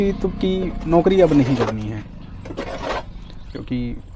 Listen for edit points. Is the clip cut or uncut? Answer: uncut